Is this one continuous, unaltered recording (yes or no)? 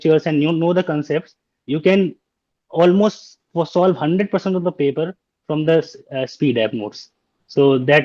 yes